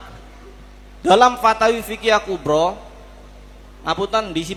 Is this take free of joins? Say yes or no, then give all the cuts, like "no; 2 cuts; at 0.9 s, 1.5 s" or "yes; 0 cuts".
yes; 0 cuts